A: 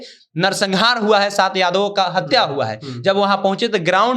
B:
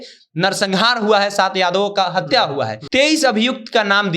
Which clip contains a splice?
B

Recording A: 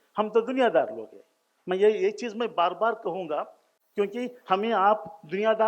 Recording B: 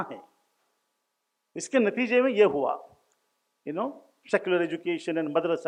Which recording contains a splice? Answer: A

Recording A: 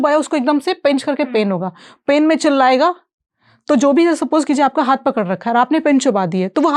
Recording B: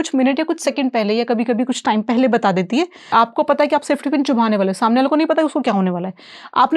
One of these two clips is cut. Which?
B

